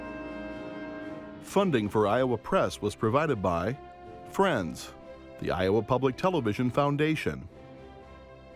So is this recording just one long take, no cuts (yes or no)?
no